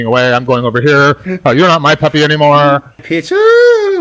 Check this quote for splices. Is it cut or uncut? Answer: cut